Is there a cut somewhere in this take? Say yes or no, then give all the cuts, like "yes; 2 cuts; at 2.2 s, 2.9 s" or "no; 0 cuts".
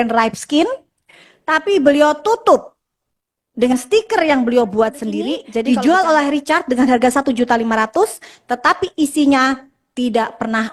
yes; 1 cut; at 5.5 s